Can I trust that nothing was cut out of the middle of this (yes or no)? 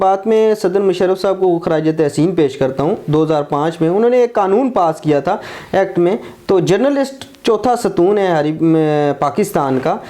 yes